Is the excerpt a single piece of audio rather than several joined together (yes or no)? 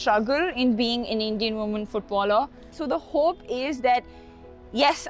no